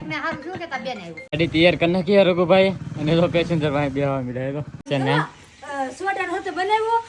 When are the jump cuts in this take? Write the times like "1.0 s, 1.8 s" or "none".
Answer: 1.3 s, 4.8 s

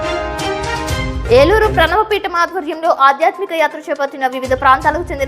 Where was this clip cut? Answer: 1.1 s

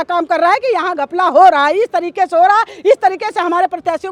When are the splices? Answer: none

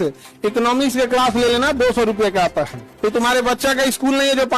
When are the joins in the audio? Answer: 2.8 s

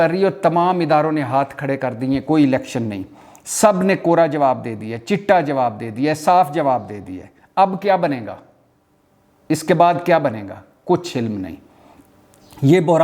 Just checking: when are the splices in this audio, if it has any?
none

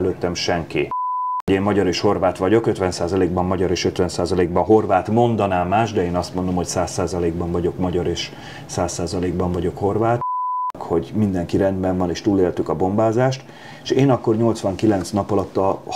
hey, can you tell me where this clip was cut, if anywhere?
1.4 s, 10.3 s

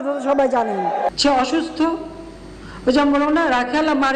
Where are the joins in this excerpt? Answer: 1.2 s

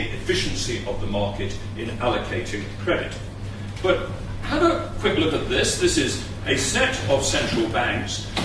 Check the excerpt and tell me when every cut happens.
2.1 s

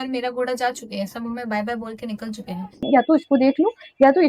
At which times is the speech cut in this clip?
2.9 s

